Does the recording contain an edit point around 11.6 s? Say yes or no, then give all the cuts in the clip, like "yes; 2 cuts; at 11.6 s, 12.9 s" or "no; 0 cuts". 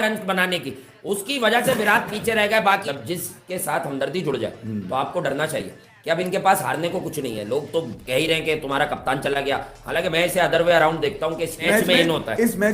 yes; 2 cuts; at 2.8 s, 11.6 s